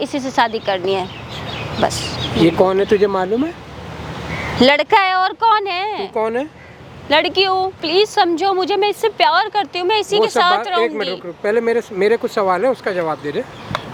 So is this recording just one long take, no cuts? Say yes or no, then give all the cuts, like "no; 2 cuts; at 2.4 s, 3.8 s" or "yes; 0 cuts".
yes; 0 cuts